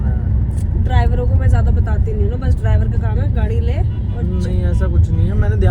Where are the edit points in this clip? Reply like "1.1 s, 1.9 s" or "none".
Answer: none